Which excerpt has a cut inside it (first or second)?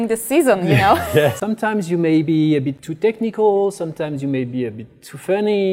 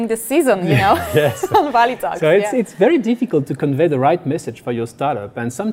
first